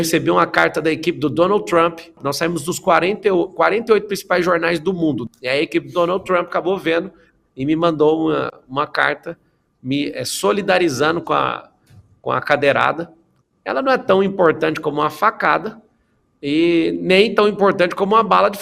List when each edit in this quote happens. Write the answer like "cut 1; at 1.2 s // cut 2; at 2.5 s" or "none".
cut 1; at 2.2 s // cut 2; at 5.2 s